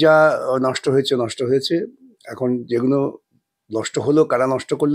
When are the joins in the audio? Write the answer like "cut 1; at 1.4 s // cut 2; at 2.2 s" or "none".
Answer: none